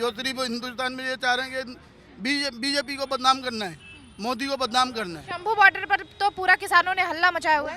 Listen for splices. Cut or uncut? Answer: uncut